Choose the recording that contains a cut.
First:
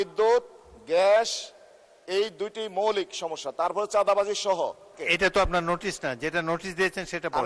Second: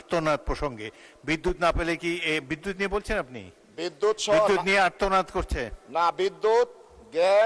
first; 1 cut; at 4.9 s

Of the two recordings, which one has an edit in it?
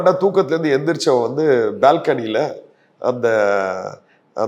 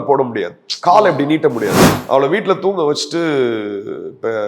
second; 1 cut; at 1.9 s

